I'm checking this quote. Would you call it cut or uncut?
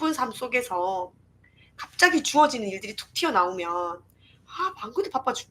uncut